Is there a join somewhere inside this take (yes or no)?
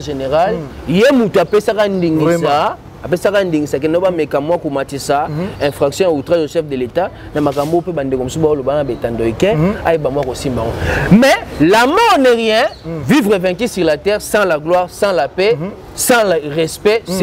no